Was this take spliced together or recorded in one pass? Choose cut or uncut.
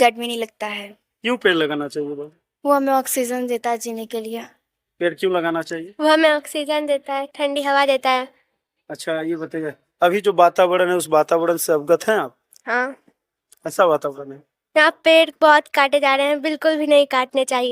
uncut